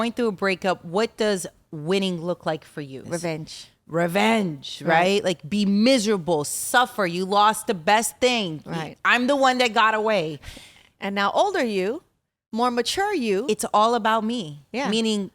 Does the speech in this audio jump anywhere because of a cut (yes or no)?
yes